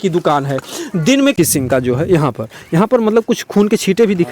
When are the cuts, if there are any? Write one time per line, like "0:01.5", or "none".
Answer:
0:01.3